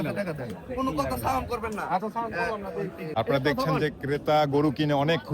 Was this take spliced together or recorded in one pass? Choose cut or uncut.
cut